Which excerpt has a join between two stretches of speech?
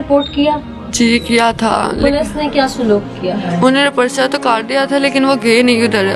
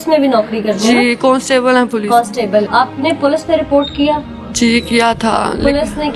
second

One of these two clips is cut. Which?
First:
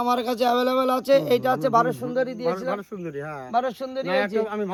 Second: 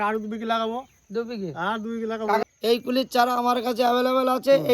second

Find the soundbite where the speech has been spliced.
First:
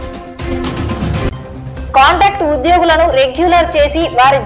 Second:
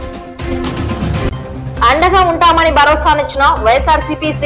second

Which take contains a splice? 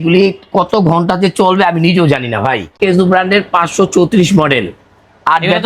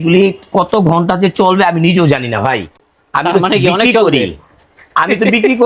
first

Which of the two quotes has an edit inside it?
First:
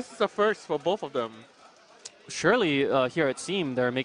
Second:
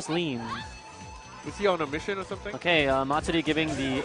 first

